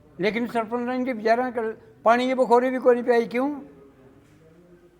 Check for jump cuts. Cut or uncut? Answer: uncut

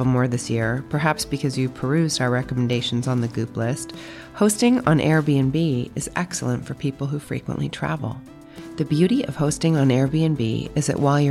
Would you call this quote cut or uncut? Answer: uncut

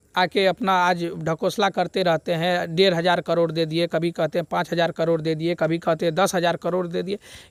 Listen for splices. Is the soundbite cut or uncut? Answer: uncut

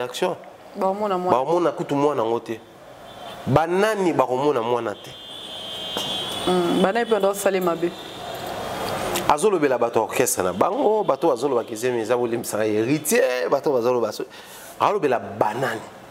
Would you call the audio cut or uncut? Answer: uncut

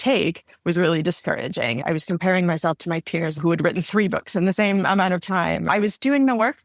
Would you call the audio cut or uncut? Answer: cut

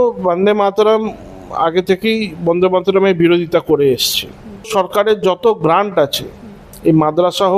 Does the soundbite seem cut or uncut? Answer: cut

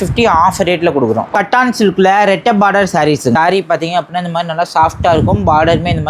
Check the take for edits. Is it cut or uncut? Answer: cut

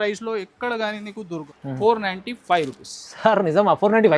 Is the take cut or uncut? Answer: cut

